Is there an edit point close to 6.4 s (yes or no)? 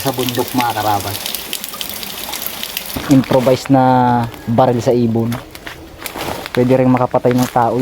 yes